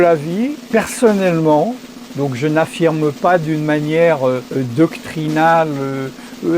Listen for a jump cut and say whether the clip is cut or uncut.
cut